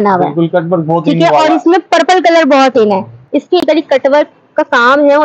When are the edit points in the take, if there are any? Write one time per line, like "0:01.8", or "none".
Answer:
0:03.6